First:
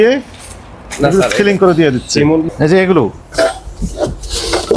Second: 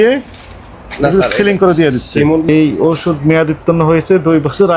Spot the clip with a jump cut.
second; 1 cut; at 2.5 s

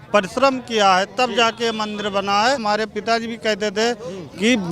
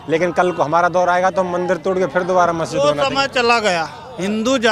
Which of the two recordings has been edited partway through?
first; 1 cut; at 2.6 s

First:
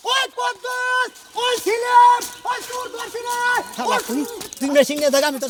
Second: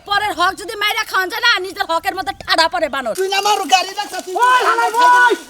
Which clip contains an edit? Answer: second; 1 cut; at 3.1 s

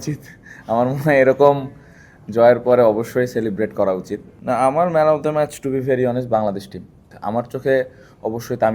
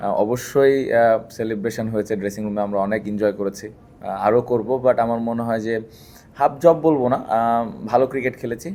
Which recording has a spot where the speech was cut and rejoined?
first; 2 cuts; at 4.2 s, 7.1 s

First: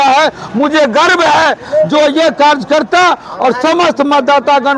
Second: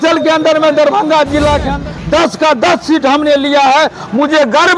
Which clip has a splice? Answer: second; 1 cut; at 1.7 s

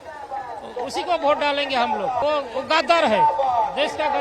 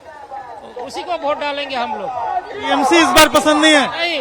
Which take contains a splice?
first; 1 cut; at 2.2 s

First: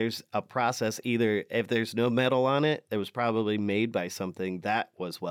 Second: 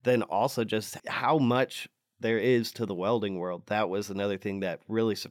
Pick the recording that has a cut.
second; 1 cut; at 1.0 s

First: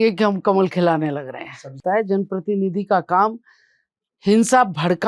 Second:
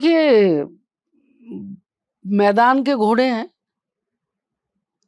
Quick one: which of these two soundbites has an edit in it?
first; 1 cut; at 1.8 s

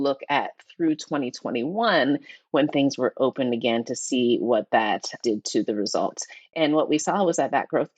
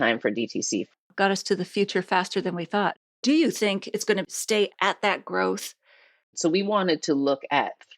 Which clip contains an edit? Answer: second; 4 cuts; at 1.0 s, 3.0 s, 4.7 s, 6.3 s

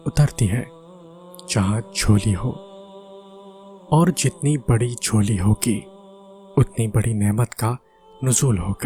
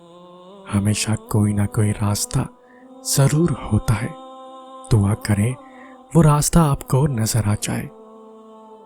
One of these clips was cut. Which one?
second; 1 cut; at 7.9 s

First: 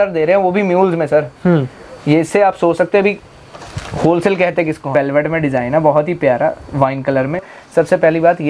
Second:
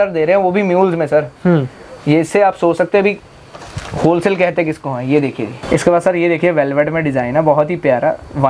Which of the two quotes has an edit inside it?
first; 2 cuts; at 4.9 s, 7.5 s

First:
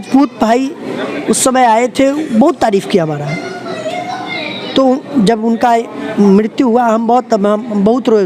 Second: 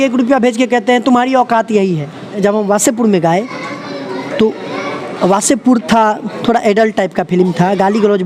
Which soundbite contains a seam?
second; 1 cut; at 2.4 s

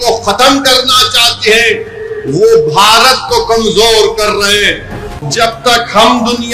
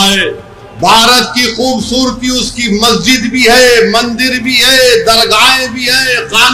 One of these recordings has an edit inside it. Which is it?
first; 1 cut; at 5.0 s

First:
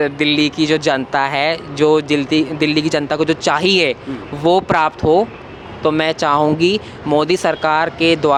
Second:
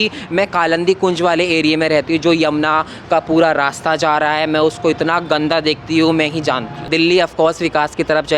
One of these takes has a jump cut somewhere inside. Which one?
second; 1 cut; at 6.8 s

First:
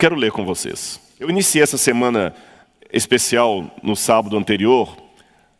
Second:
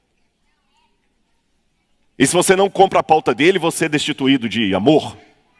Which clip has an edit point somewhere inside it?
first; 1 cut; at 1.3 s

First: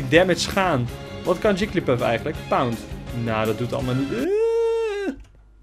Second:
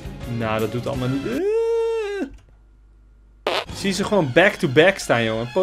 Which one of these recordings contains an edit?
second; 1 cut; at 3.7 s

